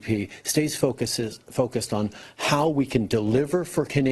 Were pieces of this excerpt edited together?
no; 0 cuts

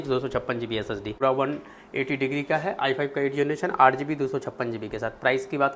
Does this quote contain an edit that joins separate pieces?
yes; 1 cut; at 1.1 s

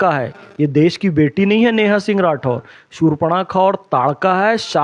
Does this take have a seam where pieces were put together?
no; 0 cuts

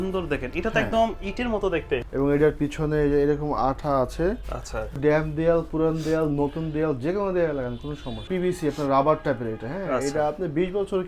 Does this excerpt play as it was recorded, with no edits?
no; 3 cuts; at 2.0 s, 4.9 s, 8.3 s

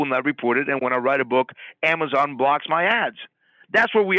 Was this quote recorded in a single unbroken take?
yes; 0 cuts

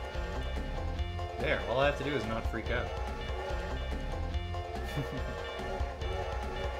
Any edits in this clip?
no; 0 cuts

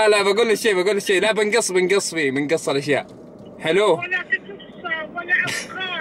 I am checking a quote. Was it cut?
no; 0 cuts

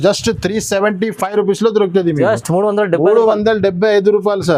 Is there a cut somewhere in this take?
no; 0 cuts

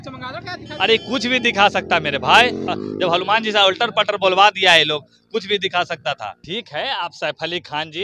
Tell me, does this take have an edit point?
yes; 2 cuts; at 2.7 s, 6.4 s

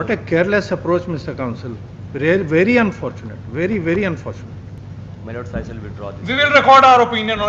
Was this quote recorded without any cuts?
yes; 0 cuts

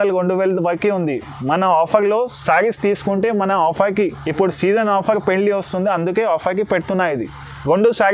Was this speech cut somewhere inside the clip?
no; 0 cuts

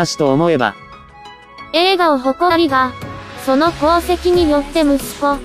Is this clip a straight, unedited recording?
yes; 0 cuts

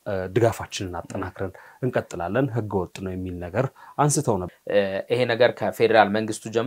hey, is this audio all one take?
no; 1 cut; at 4.5 s

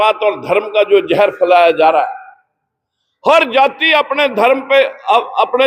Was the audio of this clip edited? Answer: no; 0 cuts

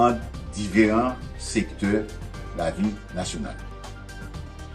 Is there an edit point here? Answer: yes; 1 cut; at 3.6 s

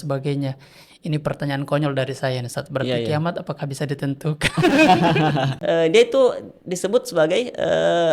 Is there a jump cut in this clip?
yes; 1 cut; at 5.5 s

